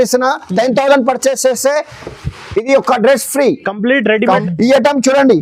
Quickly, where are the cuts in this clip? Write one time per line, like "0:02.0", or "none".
0:04.4